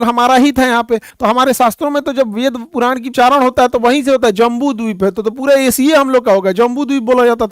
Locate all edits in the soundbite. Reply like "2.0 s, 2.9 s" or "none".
1.1 s, 3.1 s